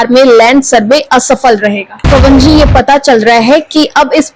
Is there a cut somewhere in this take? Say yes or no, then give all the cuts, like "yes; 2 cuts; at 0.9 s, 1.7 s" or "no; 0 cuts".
yes; 1 cut; at 2.1 s